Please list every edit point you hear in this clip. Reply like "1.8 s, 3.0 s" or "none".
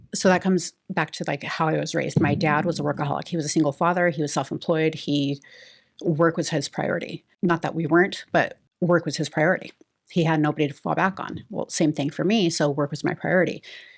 7.2 s, 8.6 s